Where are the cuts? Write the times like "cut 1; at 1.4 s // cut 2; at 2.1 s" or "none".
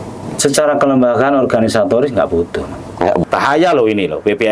cut 1; at 3.2 s